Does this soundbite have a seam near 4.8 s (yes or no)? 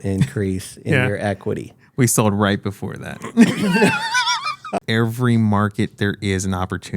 yes